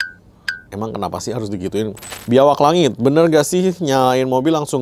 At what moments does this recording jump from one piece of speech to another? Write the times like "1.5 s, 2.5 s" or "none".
2.1 s